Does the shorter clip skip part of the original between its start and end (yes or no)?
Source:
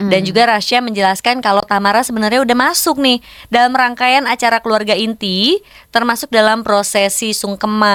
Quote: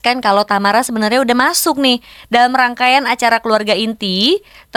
no